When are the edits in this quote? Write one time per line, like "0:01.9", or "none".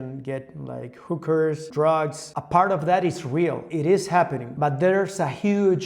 0:02.2
0:03.7
0:04.4